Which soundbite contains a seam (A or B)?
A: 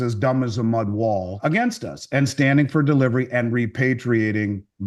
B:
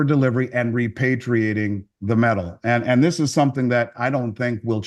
A